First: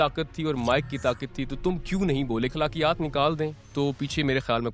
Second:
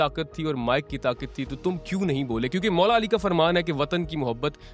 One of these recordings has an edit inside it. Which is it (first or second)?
first